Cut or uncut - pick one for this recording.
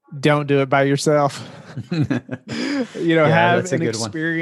uncut